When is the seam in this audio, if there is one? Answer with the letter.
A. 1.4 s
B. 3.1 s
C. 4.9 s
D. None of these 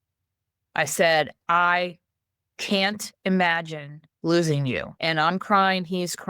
C